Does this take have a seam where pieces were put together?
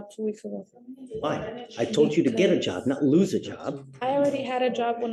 no; 0 cuts

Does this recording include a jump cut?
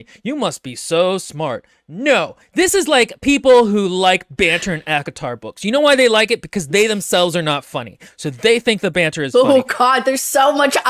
no; 0 cuts

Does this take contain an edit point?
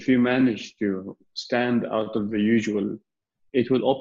no; 0 cuts

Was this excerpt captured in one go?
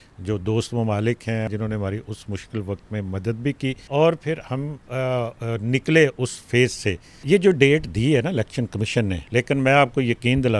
no; 4 cuts; at 1.5 s, 3.8 s, 7.1 s, 9.2 s

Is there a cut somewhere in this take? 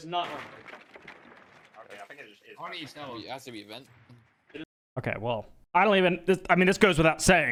no; 0 cuts

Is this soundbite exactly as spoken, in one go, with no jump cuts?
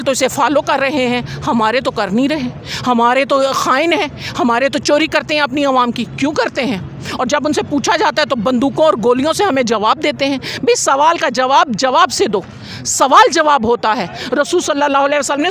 yes; 0 cuts

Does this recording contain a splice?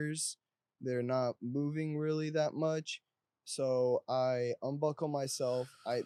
no; 0 cuts

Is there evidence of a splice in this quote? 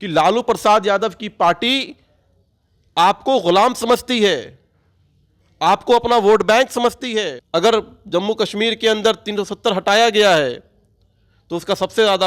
yes; 1 cut; at 7.4 s

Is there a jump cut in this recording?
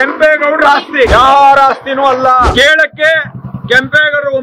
yes; 2 cuts; at 1.1 s, 2.5 s

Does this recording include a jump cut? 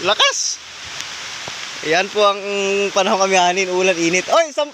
no; 0 cuts

